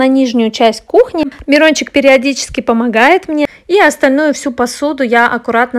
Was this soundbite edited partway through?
yes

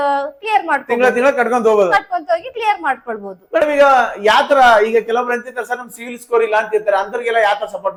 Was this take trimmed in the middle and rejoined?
no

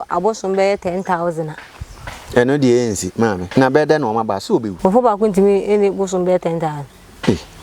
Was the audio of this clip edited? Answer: yes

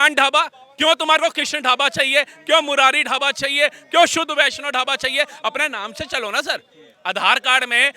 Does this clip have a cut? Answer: no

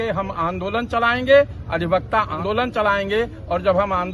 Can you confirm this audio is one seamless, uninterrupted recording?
no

